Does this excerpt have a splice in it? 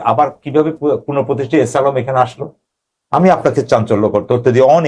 no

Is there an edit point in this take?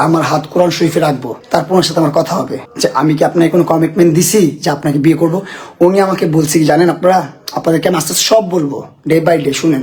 no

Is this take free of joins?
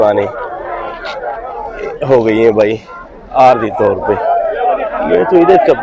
yes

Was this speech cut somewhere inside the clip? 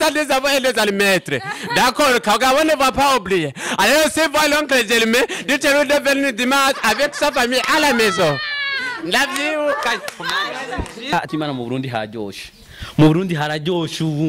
yes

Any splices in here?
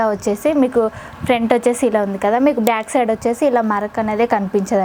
no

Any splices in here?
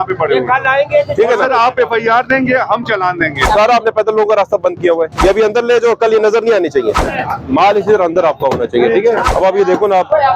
yes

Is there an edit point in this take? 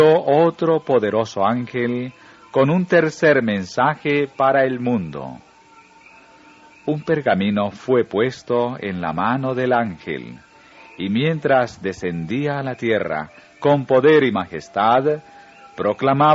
yes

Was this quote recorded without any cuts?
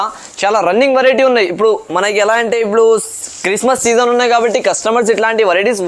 yes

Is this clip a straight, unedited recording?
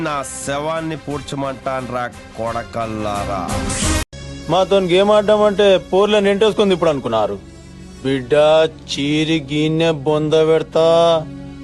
no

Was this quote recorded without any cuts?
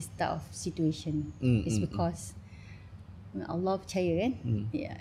yes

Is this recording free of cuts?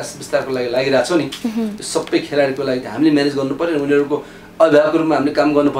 yes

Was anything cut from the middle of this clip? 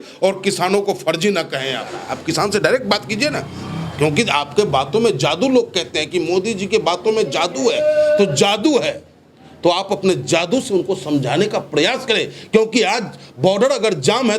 yes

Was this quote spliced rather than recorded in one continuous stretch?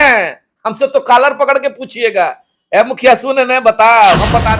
no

